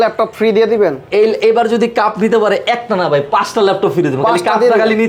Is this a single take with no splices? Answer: yes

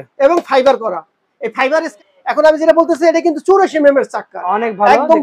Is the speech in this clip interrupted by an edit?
yes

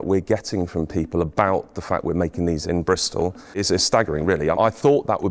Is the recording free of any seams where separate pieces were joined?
no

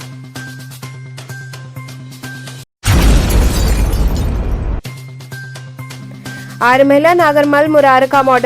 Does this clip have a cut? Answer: no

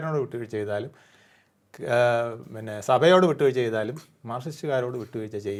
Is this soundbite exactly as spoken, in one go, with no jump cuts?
yes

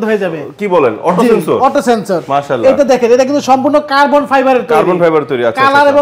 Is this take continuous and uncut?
yes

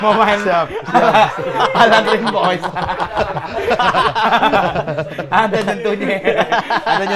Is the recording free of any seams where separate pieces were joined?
yes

